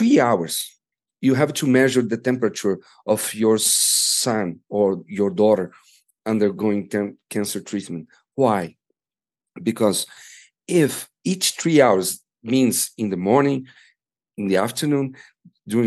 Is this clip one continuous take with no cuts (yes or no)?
yes